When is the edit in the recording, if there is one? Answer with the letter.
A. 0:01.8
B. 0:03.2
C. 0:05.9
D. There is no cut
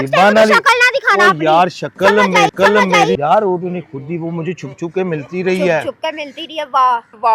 B